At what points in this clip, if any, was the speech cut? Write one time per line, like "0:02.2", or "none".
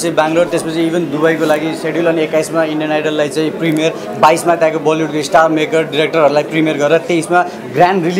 none